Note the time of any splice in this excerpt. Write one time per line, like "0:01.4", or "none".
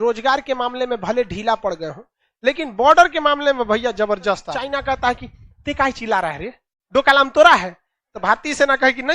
0:04.8

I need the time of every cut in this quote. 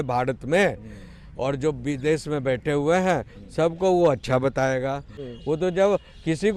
0:05.2

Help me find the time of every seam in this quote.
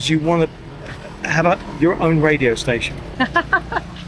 0:03.0

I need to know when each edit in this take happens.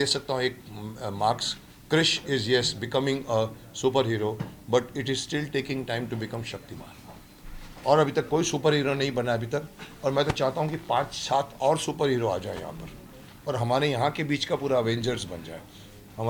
none

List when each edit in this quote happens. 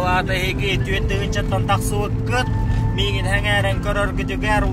none

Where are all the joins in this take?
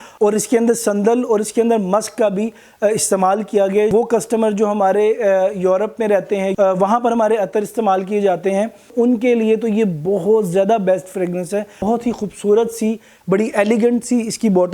0:03.9
0:06.5
0:08.9
0:11.8

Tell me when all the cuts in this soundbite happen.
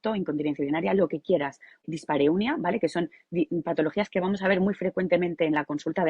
0:01.8

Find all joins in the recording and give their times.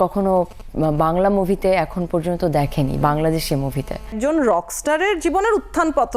0:04.1

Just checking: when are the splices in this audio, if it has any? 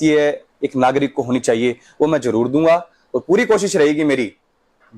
none

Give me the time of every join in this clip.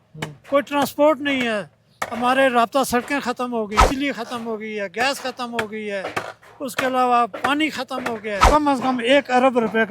0:03.9
0:08.5

